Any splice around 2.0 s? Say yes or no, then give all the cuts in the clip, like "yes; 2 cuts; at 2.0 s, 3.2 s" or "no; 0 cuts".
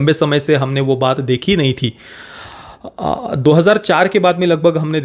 no; 0 cuts